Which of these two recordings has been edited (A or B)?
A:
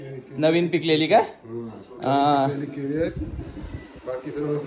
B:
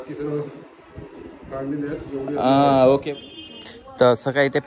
B